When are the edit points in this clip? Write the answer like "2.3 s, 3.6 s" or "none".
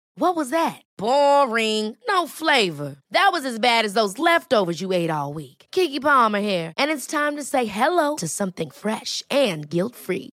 none